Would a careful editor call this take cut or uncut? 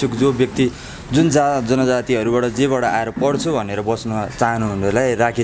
uncut